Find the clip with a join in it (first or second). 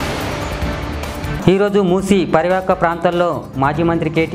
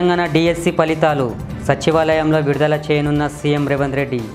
first